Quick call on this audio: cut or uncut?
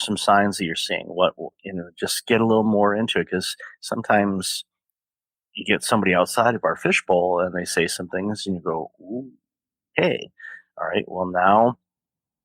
uncut